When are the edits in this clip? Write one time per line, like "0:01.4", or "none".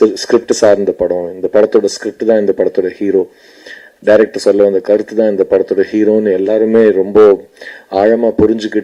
none